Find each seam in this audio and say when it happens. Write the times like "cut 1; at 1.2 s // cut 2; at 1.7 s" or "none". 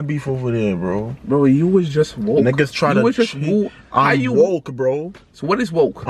none